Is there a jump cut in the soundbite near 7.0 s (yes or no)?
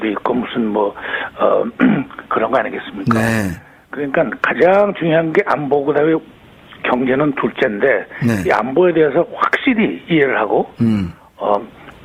no